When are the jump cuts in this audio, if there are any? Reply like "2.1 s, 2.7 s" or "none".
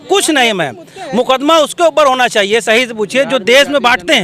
none